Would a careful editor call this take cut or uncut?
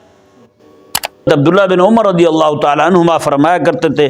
cut